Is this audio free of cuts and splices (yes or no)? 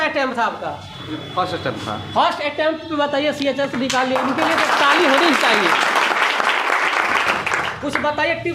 yes